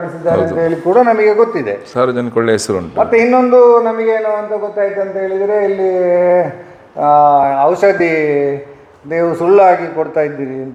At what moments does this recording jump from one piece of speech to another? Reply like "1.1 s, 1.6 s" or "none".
none